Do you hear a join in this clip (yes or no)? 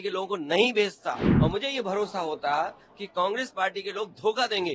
yes